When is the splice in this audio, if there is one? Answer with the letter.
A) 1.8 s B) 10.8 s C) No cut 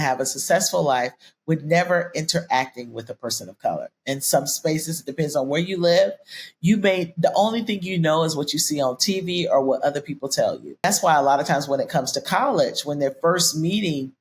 B